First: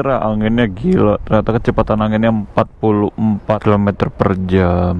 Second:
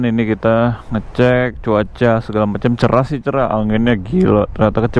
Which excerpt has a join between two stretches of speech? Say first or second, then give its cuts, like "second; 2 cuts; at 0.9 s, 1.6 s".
first; 1 cut; at 3.6 s